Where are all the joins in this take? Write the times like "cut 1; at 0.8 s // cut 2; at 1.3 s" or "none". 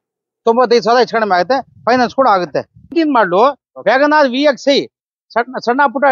cut 1; at 2.9 s